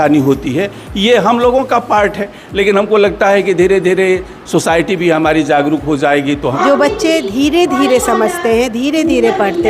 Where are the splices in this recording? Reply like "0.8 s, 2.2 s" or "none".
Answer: 6.4 s